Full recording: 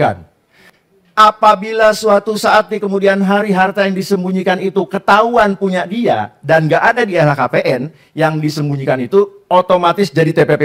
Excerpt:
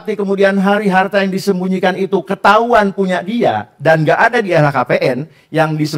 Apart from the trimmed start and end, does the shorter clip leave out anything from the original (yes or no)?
no